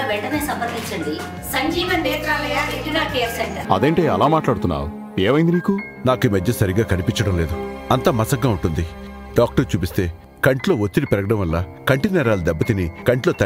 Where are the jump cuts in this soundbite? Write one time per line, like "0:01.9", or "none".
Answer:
0:03.6